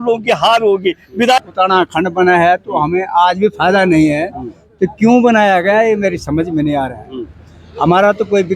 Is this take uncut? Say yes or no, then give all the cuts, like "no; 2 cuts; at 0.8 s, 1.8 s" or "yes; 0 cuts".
no; 1 cut; at 1.4 s